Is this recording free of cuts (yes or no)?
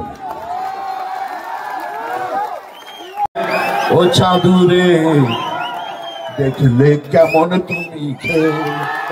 no